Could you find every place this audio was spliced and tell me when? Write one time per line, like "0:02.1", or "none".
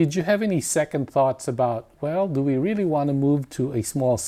none